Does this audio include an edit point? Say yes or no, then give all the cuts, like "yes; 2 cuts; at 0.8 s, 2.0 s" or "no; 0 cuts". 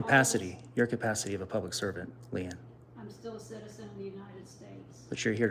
no; 0 cuts